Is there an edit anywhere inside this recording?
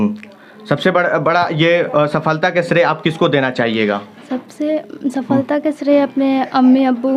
no; 0 cuts

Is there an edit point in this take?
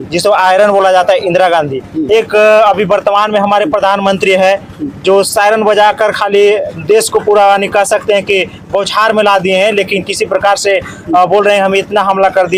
no; 0 cuts

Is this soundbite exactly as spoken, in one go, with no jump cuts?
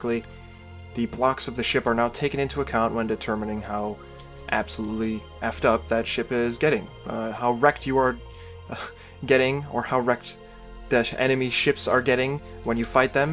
no; 1 cut; at 4.0 s

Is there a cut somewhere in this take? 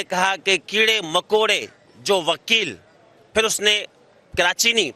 no; 0 cuts

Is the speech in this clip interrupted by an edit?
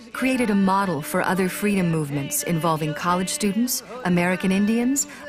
yes; 1 cut; at 3.8 s

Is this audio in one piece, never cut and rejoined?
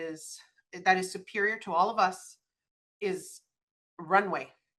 yes; 0 cuts

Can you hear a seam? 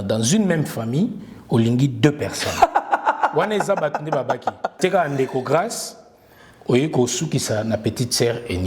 yes; 1 cut; at 4.8 s

